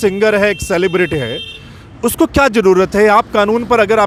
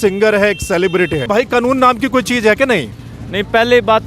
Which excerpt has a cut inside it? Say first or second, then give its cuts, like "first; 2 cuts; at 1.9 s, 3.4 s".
second; 1 cut; at 1.2 s